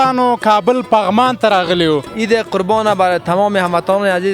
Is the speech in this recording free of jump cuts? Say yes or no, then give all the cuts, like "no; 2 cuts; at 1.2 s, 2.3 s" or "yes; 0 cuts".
no; 1 cut; at 2.1 s